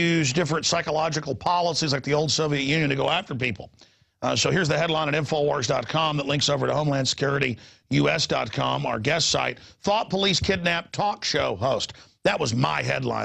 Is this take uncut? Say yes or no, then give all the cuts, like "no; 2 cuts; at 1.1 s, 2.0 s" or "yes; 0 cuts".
no; 1 cut; at 10.6 s